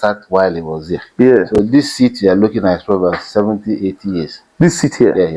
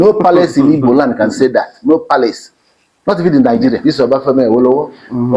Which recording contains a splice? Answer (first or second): second